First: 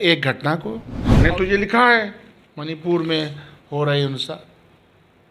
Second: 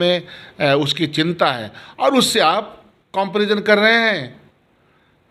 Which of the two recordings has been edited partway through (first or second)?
first